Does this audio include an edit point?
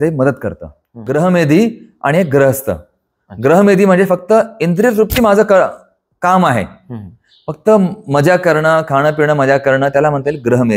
yes; 1 cut; at 1.0 s

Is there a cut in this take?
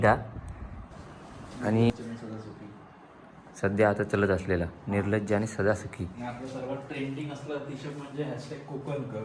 yes; 1 cut; at 1.9 s

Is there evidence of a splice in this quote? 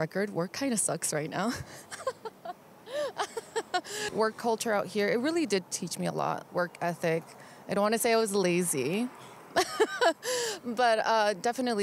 no; 0 cuts

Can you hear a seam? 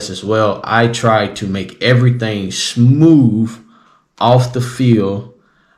no; 0 cuts

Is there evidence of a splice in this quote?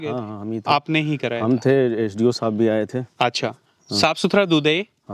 no; 0 cuts

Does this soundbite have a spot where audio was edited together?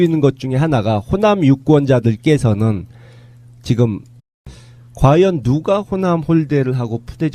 no; 0 cuts

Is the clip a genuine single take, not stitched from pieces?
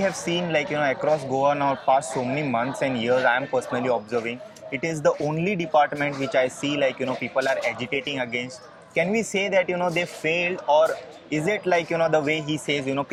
yes; 0 cuts

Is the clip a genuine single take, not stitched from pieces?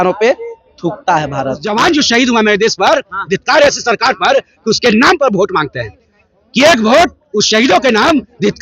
no; 1 cut; at 1.7 s

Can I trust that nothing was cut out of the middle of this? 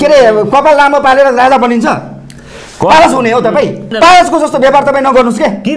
no; 1 cut; at 3.9 s

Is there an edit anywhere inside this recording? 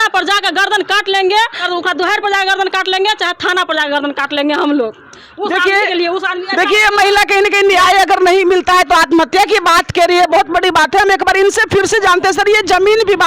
no; 0 cuts

